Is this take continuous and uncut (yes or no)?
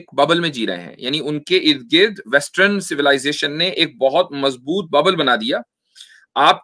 yes